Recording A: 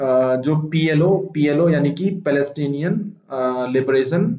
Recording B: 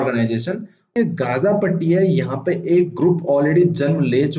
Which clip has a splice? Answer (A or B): B